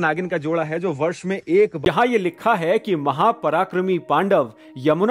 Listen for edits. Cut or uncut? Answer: cut